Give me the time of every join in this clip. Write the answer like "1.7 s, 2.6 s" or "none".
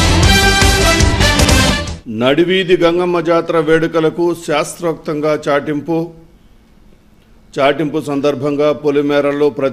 1.6 s